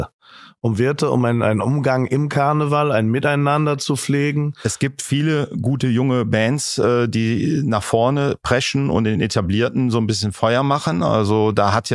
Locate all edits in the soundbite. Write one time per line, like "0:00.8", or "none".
0:04.6

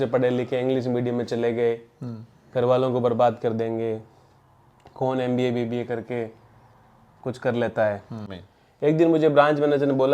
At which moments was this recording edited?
0:08.2

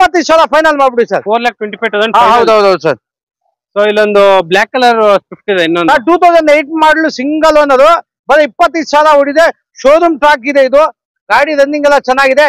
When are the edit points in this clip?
none

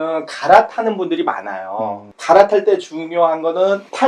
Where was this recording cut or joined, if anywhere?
none

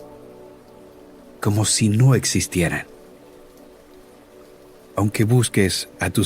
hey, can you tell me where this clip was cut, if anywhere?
0:03.4
0:05.0

